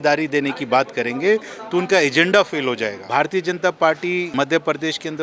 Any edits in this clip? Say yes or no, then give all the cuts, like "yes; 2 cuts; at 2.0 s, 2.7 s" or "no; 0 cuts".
yes; 2 cuts; at 2.9 s, 4.3 s